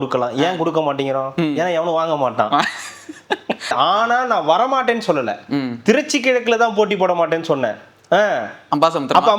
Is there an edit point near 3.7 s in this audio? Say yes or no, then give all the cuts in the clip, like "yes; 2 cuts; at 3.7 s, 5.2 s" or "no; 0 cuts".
yes; 1 cut; at 3.7 s